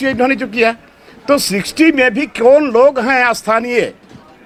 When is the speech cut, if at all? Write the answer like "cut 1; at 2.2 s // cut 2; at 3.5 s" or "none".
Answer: none